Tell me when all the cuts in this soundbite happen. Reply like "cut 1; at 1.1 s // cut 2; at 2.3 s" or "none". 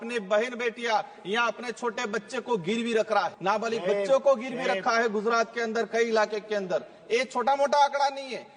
cut 1; at 3.4 s